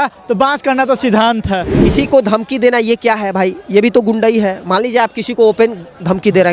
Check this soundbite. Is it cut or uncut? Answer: cut